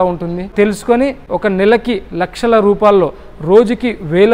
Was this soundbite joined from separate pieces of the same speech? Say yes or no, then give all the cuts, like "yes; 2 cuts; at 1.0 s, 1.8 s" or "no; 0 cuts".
yes; 1 cut; at 0.9 s